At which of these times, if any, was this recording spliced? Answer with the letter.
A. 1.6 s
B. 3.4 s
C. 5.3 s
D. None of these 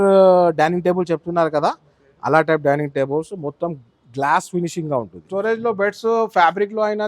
C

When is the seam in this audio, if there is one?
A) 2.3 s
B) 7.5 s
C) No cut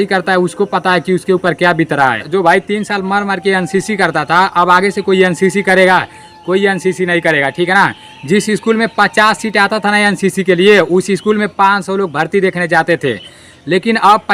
A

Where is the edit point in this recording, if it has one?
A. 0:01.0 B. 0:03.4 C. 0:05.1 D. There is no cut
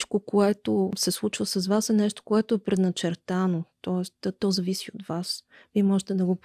A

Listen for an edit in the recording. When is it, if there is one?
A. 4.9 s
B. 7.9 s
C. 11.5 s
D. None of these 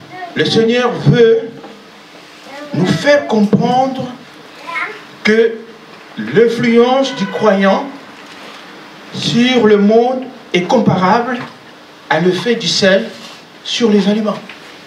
D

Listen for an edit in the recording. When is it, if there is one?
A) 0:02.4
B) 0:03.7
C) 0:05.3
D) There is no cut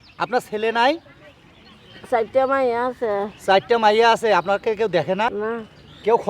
C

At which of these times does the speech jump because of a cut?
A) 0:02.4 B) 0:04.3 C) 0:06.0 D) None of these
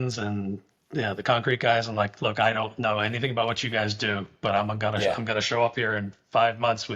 D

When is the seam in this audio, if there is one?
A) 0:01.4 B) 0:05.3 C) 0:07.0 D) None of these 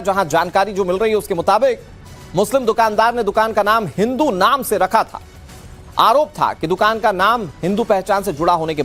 D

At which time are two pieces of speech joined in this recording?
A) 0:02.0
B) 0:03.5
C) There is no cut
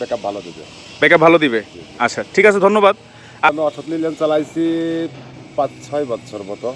B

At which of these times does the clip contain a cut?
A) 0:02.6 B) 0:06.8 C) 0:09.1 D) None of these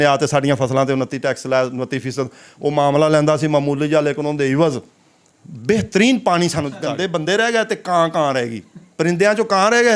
B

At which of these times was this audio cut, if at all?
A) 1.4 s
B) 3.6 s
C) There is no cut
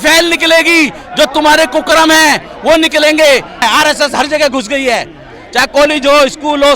B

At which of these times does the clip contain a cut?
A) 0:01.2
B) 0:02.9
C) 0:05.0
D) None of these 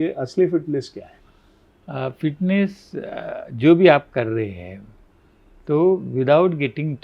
D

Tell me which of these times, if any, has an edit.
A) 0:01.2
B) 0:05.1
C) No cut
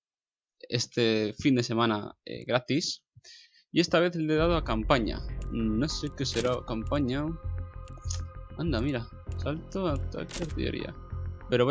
C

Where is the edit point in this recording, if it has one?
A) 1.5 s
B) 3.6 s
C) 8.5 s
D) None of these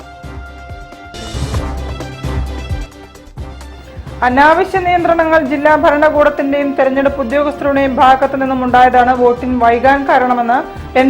B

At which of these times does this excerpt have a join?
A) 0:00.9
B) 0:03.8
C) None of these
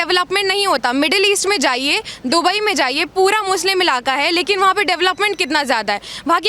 C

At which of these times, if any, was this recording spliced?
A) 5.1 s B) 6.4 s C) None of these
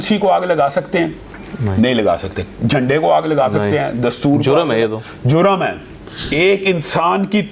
B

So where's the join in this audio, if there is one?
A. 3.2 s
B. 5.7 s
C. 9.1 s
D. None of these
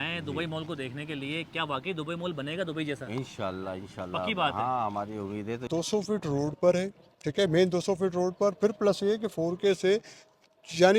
B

